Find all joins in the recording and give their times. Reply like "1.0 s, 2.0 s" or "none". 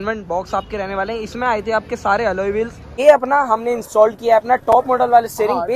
2.8 s